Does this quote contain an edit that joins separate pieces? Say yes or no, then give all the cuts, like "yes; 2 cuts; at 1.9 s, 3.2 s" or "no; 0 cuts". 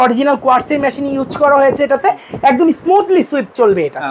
no; 0 cuts